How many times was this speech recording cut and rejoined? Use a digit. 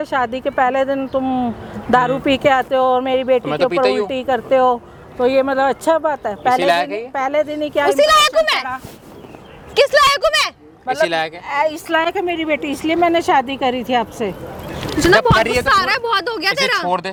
0